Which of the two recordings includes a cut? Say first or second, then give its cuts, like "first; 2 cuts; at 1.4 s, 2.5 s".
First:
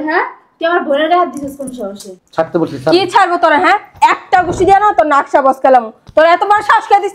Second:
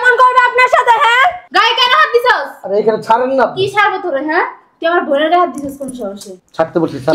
second; 1 cut; at 1.5 s